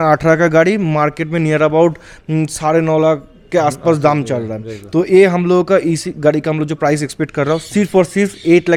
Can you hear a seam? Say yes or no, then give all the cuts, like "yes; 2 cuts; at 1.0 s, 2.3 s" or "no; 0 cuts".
no; 0 cuts